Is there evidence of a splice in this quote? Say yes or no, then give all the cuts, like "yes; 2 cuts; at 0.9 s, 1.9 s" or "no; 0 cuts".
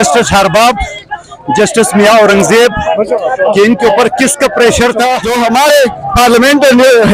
yes; 1 cut; at 5.2 s